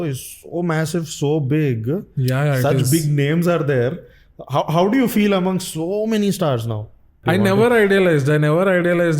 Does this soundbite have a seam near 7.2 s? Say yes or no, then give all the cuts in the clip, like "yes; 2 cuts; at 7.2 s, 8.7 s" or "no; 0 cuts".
yes; 1 cut; at 7.2 s